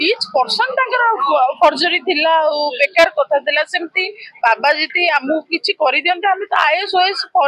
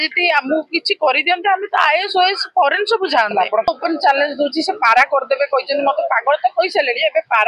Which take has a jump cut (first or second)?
second